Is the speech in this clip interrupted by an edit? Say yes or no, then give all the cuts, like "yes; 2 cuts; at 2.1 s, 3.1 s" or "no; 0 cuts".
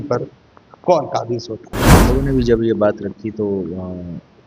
yes; 1 cut; at 1.9 s